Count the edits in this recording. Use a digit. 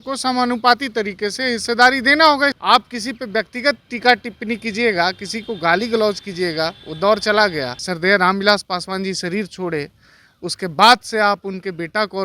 2